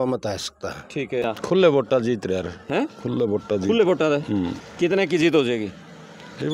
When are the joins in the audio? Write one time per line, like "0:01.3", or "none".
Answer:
0:01.2